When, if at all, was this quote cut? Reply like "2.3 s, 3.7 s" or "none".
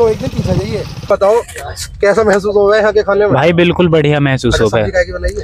1.1 s